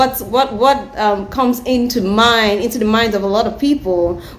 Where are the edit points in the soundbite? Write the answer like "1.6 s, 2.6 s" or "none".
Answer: none